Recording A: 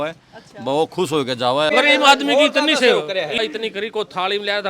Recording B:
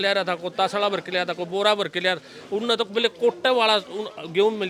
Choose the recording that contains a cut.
A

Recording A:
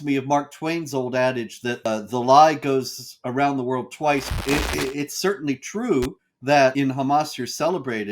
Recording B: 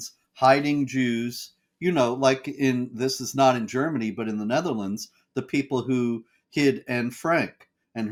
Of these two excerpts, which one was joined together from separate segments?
A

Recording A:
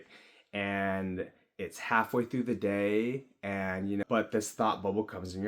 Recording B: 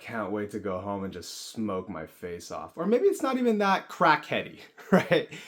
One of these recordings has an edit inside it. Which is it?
A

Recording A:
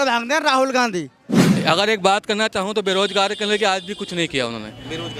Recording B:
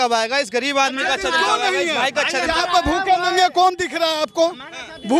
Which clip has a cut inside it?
A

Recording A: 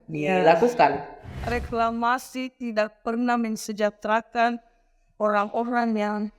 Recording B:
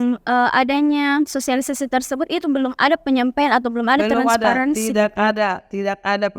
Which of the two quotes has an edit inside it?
A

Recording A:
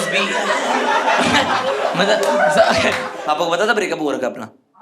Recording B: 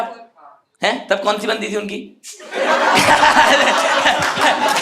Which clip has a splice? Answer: A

